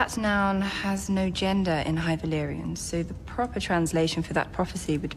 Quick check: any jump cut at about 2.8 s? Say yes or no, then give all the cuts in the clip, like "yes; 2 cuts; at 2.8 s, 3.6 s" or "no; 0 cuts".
yes; 1 cut; at 2.8 s